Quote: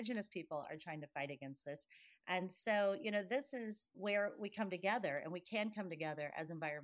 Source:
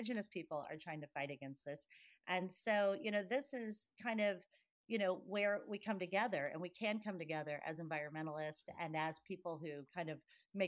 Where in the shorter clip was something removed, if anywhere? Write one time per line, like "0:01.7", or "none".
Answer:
0:03.9